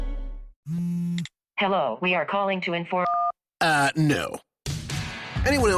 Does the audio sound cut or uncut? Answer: uncut